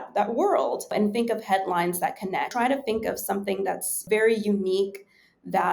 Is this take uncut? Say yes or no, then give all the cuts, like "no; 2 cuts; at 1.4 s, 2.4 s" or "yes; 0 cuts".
no; 3 cuts; at 0.8 s, 2.5 s, 4.0 s